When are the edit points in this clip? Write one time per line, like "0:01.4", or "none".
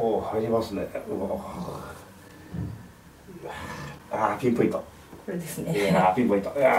none

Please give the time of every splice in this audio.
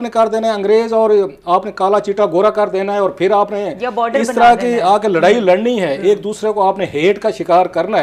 none

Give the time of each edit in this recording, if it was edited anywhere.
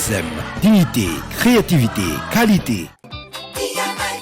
0:03.0

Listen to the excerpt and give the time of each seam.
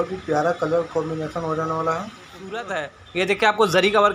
0:02.7

